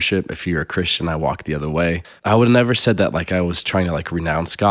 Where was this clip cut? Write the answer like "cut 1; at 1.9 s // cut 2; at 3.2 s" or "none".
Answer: cut 1; at 2.1 s